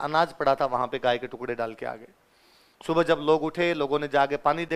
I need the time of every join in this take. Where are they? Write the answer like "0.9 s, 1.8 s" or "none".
none